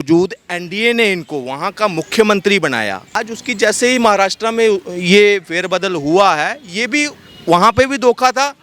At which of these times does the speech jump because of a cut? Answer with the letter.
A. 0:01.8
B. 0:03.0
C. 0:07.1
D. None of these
B